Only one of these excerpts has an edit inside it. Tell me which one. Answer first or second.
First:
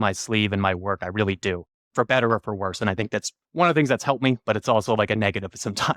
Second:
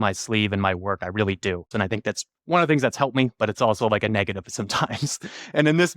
second